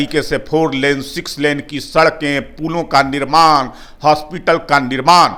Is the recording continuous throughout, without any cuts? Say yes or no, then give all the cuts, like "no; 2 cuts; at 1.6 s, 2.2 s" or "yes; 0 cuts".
yes; 0 cuts